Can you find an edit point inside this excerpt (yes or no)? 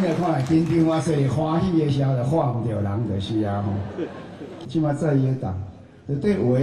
yes